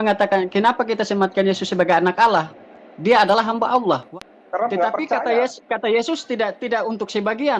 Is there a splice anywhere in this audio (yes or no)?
yes